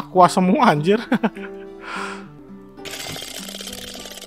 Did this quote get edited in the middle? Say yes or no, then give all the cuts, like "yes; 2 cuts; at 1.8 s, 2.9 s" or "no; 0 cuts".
yes; 1 cut; at 2.4 s